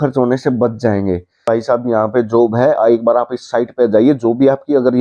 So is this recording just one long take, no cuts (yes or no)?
no